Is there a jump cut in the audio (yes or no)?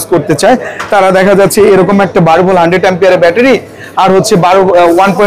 no